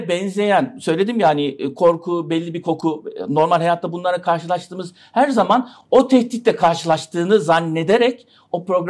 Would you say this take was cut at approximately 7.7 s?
no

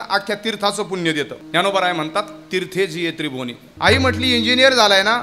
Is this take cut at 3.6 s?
yes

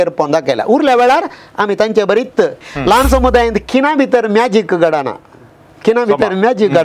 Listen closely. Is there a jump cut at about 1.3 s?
no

